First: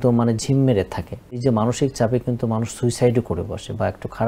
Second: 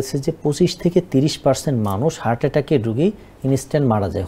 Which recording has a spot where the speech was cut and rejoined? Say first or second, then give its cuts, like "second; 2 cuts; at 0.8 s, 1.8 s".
first; 1 cut; at 1.4 s